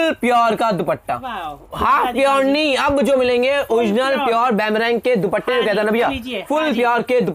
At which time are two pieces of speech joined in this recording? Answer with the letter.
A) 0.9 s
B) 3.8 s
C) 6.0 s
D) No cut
D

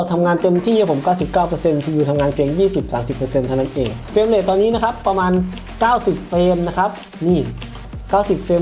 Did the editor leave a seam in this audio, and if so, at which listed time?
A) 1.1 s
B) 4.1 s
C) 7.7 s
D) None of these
B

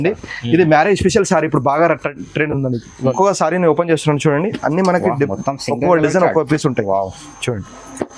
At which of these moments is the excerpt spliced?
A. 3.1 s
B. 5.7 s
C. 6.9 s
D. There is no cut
A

